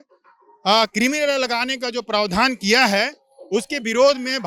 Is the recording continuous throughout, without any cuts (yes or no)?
yes